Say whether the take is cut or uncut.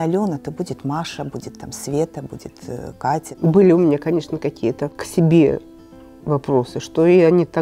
cut